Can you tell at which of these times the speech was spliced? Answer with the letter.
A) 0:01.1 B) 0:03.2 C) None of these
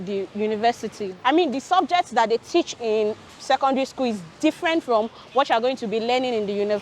A